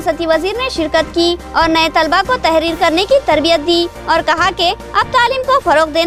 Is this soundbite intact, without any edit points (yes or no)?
yes